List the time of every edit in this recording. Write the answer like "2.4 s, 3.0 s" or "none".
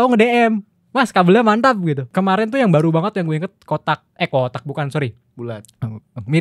2.0 s